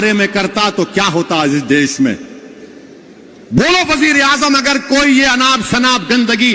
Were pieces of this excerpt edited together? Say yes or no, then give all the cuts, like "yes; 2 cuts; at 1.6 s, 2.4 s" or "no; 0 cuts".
no; 0 cuts